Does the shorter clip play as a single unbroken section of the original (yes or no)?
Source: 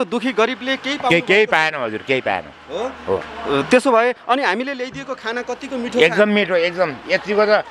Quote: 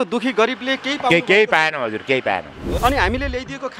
no